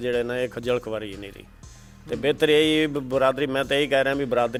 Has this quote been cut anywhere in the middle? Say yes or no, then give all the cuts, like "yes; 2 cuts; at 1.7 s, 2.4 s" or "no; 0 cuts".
no; 0 cuts